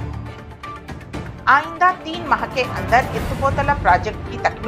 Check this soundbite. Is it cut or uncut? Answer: cut